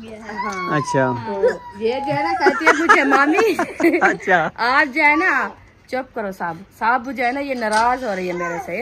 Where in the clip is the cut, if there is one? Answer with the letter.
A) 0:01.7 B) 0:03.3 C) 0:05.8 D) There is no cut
A